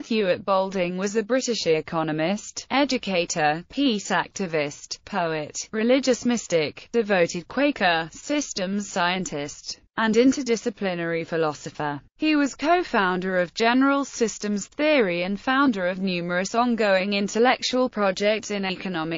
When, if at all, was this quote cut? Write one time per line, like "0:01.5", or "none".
none

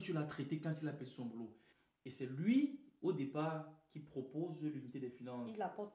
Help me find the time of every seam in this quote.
0:01.7

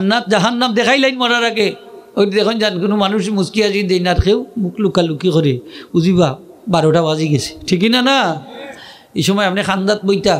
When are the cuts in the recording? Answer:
none

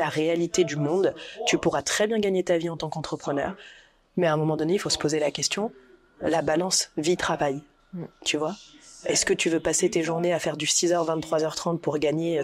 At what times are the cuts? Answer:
none

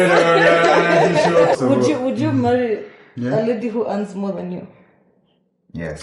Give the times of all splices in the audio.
0:01.6

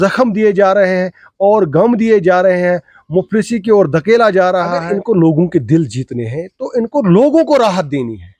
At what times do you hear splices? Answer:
0:04.9

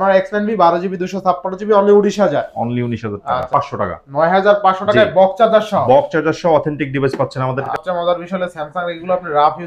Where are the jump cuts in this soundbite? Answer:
0:03.5
0:07.7

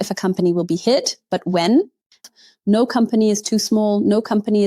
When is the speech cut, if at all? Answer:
0:02.2

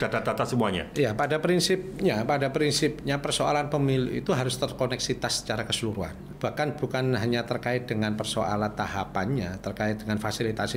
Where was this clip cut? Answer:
0:06.2

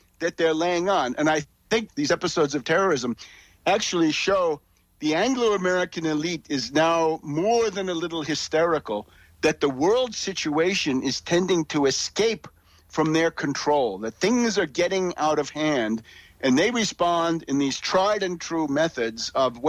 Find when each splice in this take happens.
0:01.5

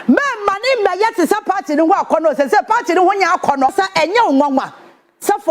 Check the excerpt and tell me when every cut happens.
0:03.7

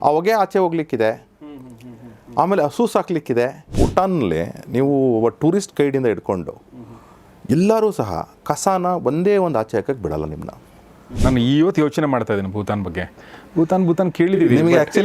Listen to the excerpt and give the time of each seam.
0:03.7
0:11.1

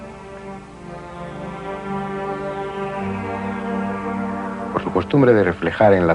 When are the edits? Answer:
0:02.1

